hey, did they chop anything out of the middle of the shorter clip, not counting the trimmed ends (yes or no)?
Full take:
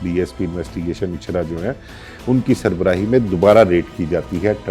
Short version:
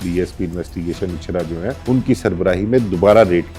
yes